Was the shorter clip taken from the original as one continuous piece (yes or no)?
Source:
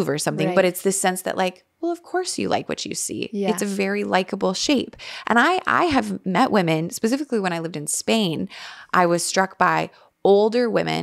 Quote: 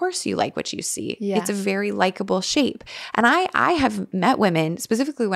yes